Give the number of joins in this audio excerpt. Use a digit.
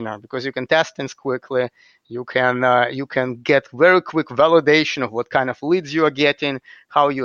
0